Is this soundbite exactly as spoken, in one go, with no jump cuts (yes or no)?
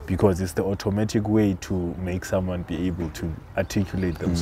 yes